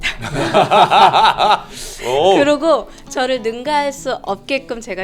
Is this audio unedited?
yes; 0 cuts

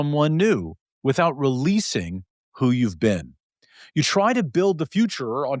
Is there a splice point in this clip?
no; 0 cuts

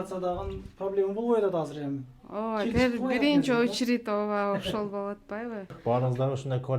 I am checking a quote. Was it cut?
yes; 1 cut; at 5.8 s

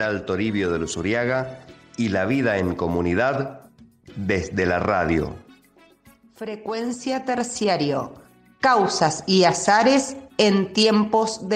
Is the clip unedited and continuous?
yes; 0 cuts

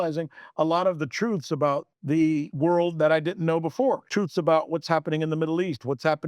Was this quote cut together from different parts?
yes; 2 cuts; at 2.4 s, 4.0 s

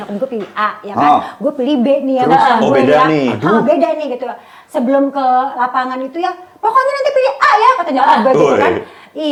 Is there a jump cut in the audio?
no; 0 cuts

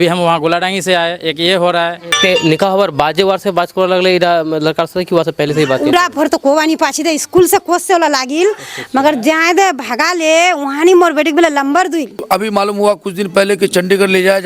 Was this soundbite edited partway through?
yes; 2 cuts; at 2.1 s, 12.2 s

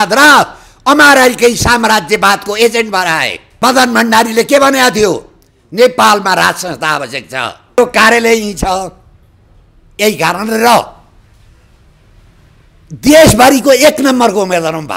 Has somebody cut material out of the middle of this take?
yes; 2 cuts; at 3.4 s, 7.8 s

